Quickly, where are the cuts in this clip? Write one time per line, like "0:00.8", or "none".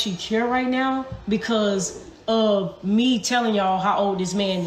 none